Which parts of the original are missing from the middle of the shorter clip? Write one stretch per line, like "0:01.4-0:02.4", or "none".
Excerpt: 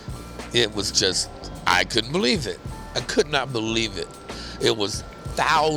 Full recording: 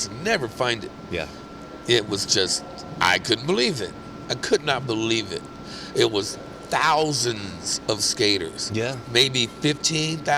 none